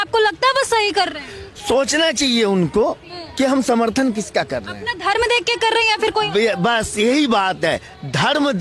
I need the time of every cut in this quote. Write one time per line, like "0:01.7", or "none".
none